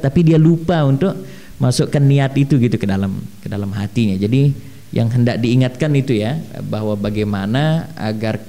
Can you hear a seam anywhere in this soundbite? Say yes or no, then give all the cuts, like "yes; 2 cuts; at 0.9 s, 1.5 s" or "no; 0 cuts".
no; 0 cuts